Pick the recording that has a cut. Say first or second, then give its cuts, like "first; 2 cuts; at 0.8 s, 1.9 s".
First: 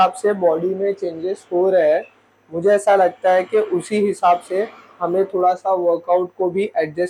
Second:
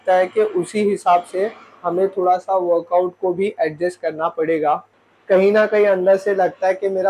second; 1 cut; at 4.9 s